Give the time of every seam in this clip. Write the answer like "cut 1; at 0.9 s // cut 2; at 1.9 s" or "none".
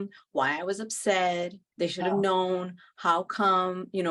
cut 1; at 1.6 s